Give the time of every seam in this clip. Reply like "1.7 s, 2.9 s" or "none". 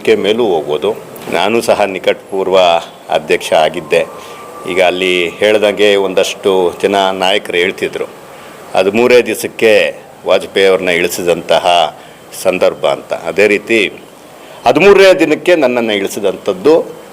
1.1 s